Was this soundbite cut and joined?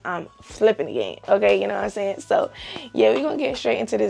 no; 0 cuts

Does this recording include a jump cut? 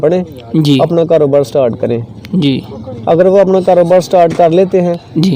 no; 0 cuts

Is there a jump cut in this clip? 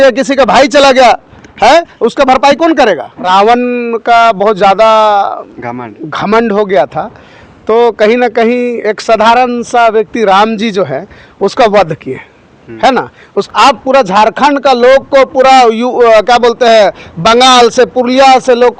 yes; 2 cuts; at 3.1 s, 13.5 s

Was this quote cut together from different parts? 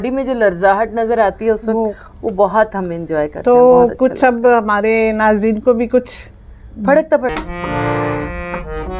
yes; 1 cut; at 7.4 s

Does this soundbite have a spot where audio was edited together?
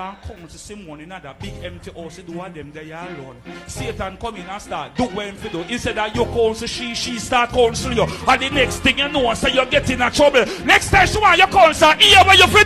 no; 0 cuts

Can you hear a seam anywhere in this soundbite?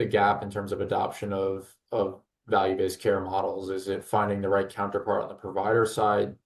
no; 0 cuts

